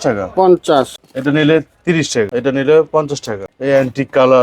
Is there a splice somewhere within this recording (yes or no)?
yes